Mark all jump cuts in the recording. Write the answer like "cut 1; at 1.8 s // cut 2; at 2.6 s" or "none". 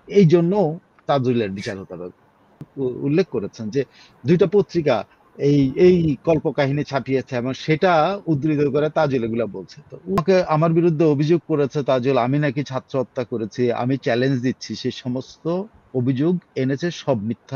cut 1; at 2.7 s // cut 2; at 10.2 s